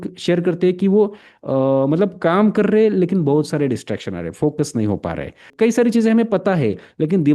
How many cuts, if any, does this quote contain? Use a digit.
1